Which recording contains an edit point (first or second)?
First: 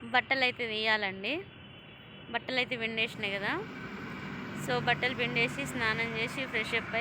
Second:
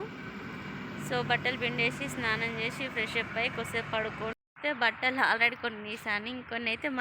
second